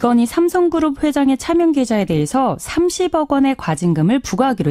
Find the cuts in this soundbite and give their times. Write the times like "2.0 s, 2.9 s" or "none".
none